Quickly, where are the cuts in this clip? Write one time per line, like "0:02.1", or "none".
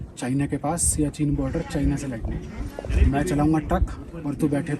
none